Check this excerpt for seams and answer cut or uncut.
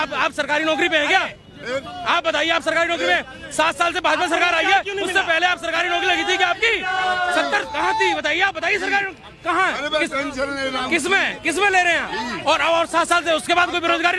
uncut